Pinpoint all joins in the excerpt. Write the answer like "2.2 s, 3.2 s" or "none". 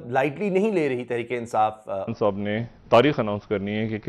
2.1 s